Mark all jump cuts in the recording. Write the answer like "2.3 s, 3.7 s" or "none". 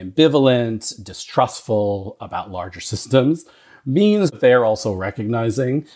4.3 s